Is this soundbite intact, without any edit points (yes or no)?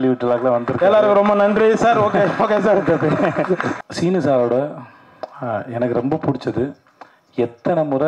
no